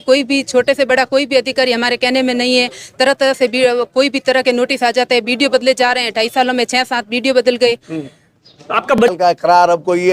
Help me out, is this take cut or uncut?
cut